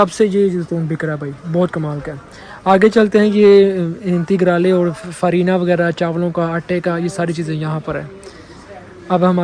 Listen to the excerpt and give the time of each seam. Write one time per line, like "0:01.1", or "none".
none